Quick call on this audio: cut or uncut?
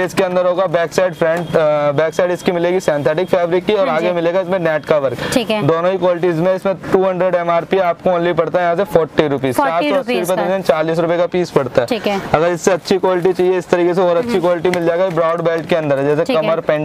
uncut